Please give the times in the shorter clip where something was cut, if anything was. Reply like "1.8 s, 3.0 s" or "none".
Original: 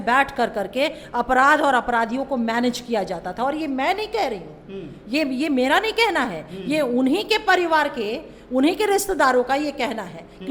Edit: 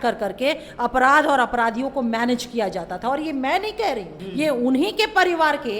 4.2 s